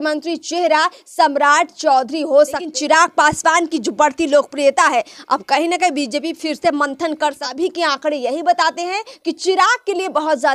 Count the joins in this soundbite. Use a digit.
2